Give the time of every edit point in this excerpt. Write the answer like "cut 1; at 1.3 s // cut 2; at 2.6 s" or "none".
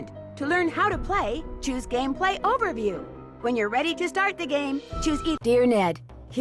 cut 1; at 5.3 s